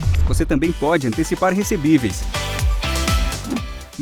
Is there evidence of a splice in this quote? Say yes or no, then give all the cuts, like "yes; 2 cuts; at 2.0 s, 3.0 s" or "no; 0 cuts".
no; 0 cuts